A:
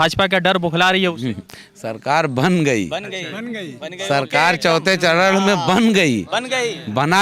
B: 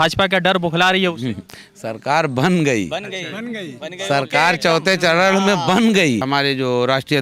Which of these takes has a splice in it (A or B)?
B